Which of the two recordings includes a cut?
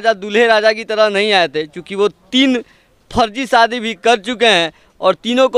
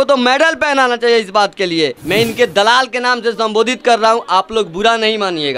second; 1 cut; at 2.0 s

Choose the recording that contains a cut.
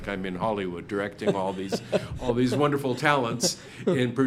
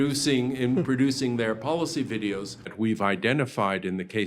second; 1 cut; at 2.7 s

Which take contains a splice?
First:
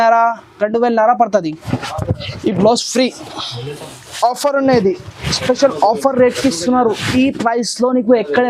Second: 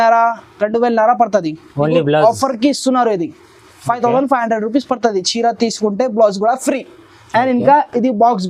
first; 1 cut; at 1.6 s

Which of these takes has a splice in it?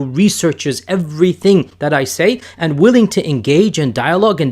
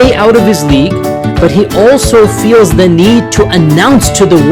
first; 2 cuts; at 1.7 s, 2.5 s

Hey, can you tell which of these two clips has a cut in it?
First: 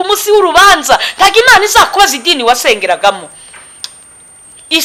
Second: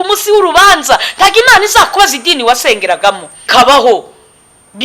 second; 1 cut; at 3.3 s

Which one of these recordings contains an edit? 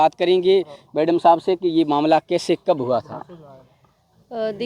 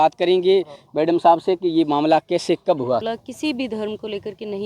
second; 1 cut; at 3.0 s

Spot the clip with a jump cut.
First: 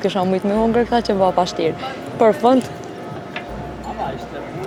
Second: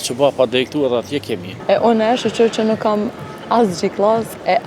second; 1 cut; at 1.5 s

